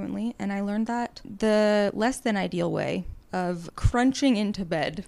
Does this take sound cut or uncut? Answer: cut